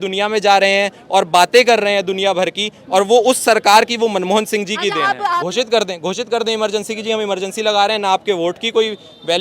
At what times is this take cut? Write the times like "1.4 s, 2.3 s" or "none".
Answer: 5.2 s